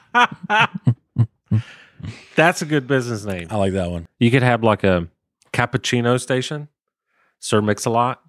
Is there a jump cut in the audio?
yes; 1 cut; at 4.0 s

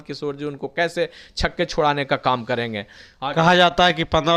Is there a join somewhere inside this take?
no; 0 cuts

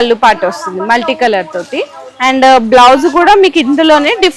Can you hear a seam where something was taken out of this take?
no; 0 cuts

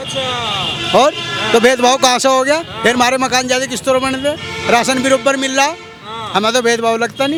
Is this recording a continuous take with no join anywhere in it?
yes; 0 cuts

